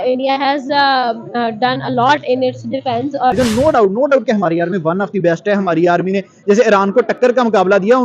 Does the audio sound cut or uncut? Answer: cut